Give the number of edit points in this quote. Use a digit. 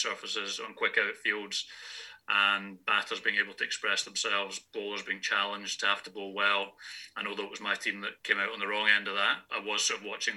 2